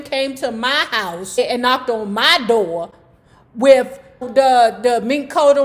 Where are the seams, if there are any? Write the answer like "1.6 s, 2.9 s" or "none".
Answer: 1.4 s, 4.3 s